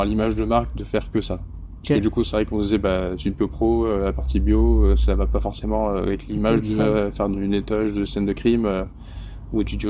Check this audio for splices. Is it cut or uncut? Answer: uncut